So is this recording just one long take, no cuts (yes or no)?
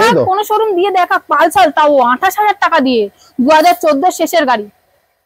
yes